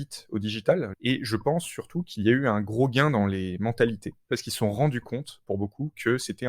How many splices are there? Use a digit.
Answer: 2